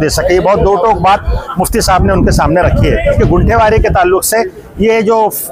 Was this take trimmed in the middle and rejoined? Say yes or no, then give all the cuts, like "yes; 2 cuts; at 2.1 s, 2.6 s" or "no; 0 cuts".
yes; 1 cut; at 3.2 s